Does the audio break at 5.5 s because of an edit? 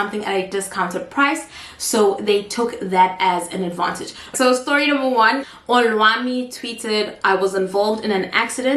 yes; 2 cuts; at 4.3 s, 5.5 s

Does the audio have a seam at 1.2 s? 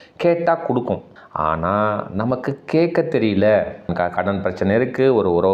yes; 2 cuts; at 1.2 s, 3.9 s

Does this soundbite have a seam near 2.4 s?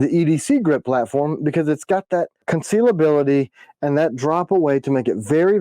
yes; 1 cut; at 2.4 s

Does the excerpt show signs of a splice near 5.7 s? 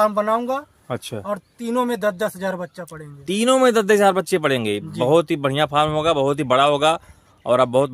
no; 0 cuts

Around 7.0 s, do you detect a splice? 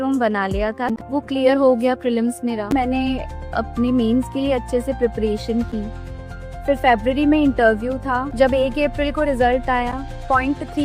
no; 3 cuts; at 1.0 s, 2.7 s, 8.2 s

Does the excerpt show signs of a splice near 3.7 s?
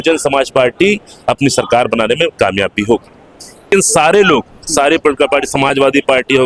yes; 1 cut; at 3.7 s

